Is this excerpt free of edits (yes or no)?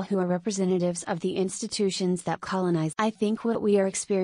yes